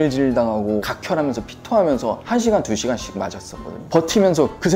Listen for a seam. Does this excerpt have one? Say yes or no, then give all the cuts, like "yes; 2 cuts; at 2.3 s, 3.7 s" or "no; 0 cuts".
yes; 2 cuts; at 0.9 s, 3.9 s